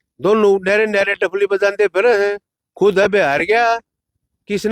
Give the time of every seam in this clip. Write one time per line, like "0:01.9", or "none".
none